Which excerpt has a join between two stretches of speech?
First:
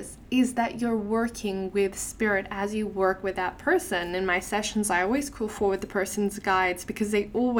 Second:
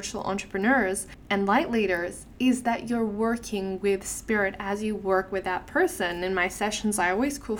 second; 1 cut; at 1.1 s

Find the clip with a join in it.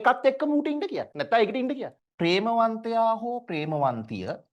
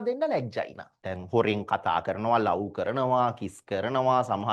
first; 1 cut; at 1.9 s

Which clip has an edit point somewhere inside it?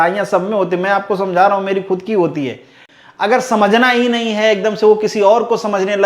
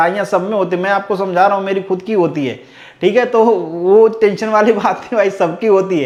first; 1 cut; at 2.8 s

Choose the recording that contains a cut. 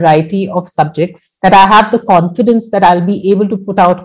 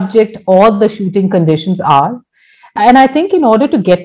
first; 1 cut; at 1.2 s

